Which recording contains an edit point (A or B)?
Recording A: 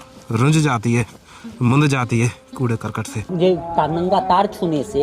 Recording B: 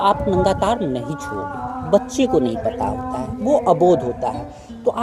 A